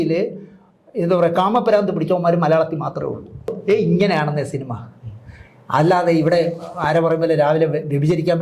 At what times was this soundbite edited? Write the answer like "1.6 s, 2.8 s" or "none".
3.5 s